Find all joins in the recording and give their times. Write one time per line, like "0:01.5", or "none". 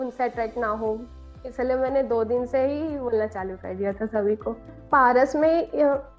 0:04.8

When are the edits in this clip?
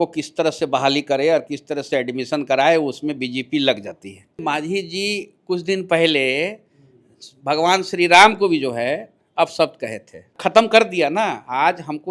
0:04.4
0:10.3

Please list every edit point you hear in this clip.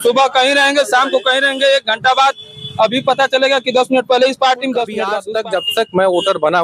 0:05.2

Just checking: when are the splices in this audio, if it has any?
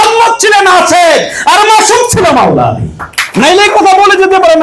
0:03.2

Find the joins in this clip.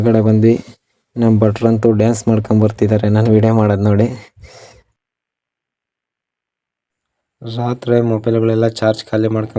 none

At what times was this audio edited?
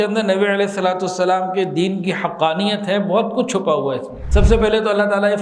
0:04.1

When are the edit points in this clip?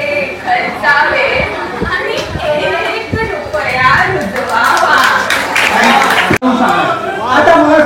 0:06.4

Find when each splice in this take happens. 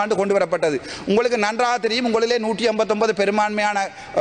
none

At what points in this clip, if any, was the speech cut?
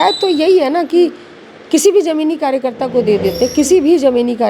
none

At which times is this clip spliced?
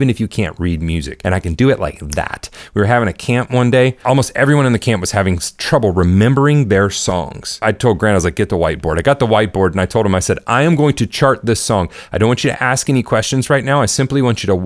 0:01.1
0:04.0
0:07.5

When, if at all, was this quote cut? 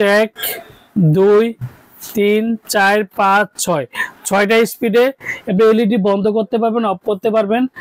none

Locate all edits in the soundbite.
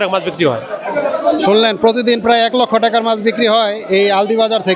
none

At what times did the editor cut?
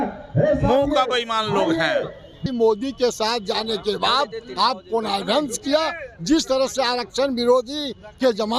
0:02.4

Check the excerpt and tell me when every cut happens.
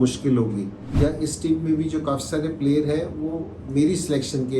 0:00.9

